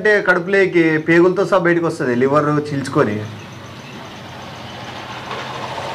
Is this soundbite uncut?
yes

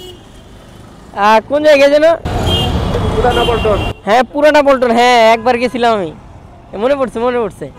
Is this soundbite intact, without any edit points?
yes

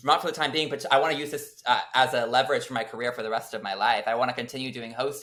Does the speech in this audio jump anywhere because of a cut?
no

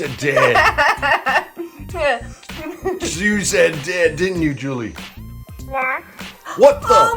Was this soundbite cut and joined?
no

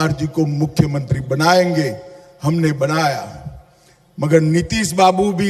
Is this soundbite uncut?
yes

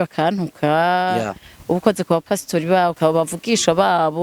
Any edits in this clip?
yes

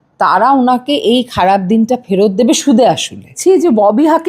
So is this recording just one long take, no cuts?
no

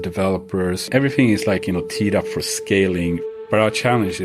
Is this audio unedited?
no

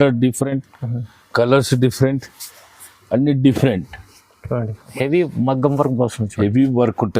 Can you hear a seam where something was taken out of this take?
yes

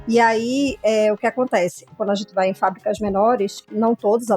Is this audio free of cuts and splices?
no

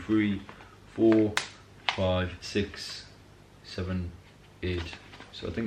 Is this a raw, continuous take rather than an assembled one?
yes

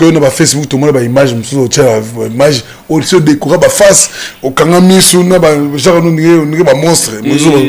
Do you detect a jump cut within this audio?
no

